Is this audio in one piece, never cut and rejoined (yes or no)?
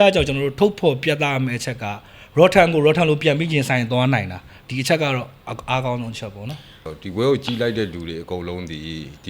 no